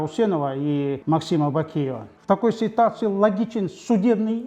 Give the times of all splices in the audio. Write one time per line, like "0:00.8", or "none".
0:01.0
0:02.1

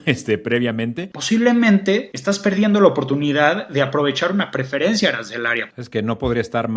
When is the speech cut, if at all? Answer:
0:01.1
0:05.6

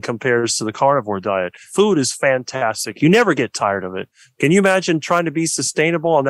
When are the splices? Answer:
0:01.6
0:04.0

